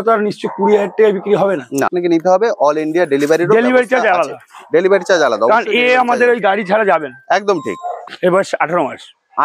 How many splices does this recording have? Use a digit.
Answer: 2